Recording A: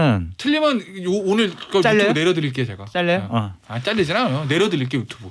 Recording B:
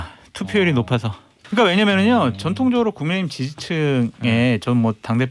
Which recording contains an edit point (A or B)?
B